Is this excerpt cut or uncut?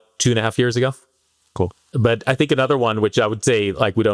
cut